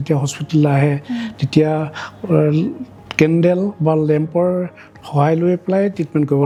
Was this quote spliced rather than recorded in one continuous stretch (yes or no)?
no